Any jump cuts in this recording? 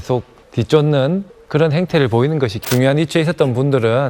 yes; 1 cut; at 2.6 s

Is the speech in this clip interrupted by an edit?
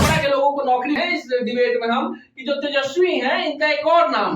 yes; 1 cut; at 1.0 s

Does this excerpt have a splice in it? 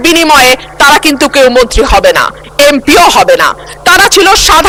no; 0 cuts

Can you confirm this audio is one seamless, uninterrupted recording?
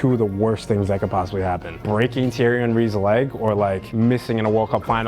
no; 2 cuts; at 1.8 s, 3.9 s

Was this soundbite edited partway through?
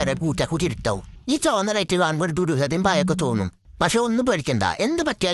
yes; 1 cut; at 1.1 s

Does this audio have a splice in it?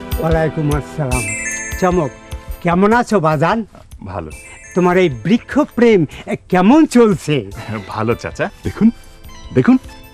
yes; 1 cut; at 8.6 s

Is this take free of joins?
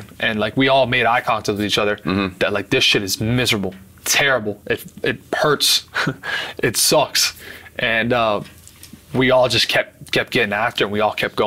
yes; 0 cuts

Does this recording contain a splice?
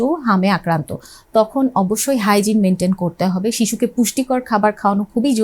no; 0 cuts

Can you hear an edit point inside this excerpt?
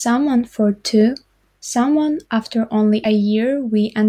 yes; 1 cut; at 3.0 s

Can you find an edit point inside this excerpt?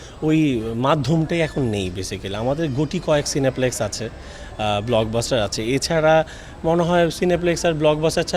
no; 0 cuts

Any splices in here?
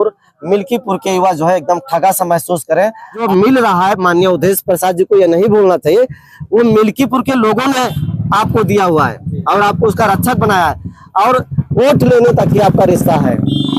yes; 1 cut; at 3.2 s

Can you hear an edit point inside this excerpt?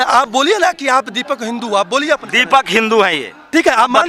no; 0 cuts

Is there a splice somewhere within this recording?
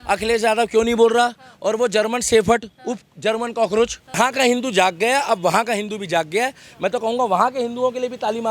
yes; 1 cut; at 4.2 s

